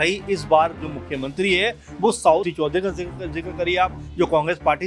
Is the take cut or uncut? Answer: cut